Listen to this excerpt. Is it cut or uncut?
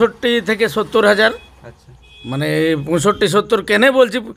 uncut